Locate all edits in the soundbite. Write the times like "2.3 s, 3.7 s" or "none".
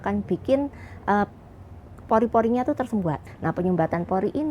3.2 s